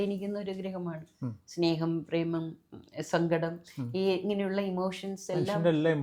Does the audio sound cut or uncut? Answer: uncut